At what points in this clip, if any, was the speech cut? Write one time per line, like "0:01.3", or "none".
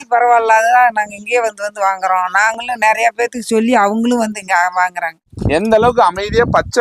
0:05.3